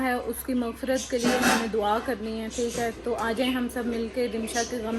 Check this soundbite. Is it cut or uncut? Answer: uncut